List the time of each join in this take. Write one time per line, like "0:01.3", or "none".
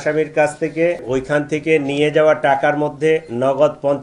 0:01.1